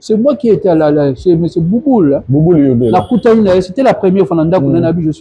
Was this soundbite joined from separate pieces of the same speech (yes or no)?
no